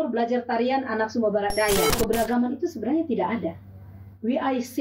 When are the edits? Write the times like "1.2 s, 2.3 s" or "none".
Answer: 1.9 s

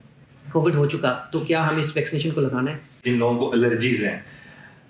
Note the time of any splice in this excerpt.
3.0 s

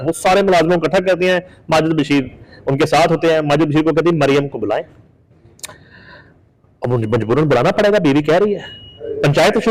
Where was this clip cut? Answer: none

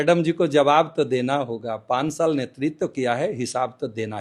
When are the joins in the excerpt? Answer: none

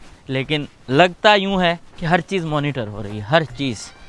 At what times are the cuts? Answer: none

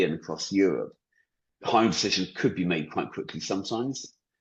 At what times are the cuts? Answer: none

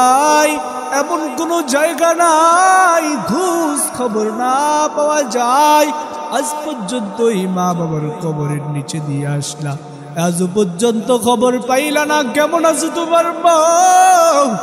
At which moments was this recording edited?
none

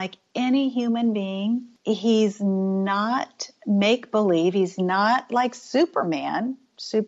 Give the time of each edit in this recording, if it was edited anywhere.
1.7 s

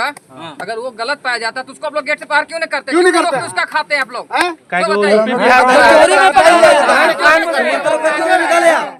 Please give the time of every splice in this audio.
none

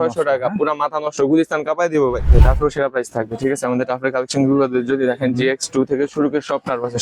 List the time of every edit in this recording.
2.3 s

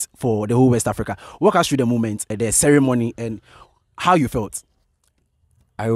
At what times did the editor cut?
none

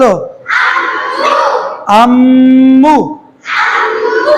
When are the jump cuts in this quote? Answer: none

